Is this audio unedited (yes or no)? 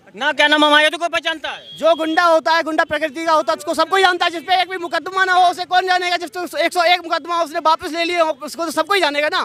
yes